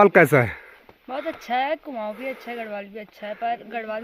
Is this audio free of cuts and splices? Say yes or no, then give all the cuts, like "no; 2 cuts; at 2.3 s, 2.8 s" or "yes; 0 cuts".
yes; 0 cuts